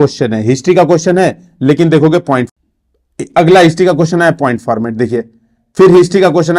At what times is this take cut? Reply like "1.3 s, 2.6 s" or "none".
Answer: 2.5 s